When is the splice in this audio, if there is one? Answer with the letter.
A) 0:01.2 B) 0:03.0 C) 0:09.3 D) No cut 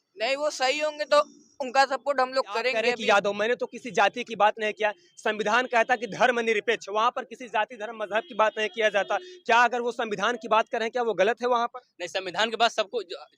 B